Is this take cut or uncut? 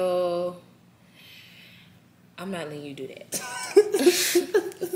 uncut